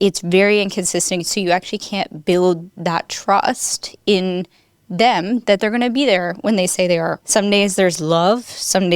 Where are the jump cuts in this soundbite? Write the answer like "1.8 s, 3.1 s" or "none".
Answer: 7.2 s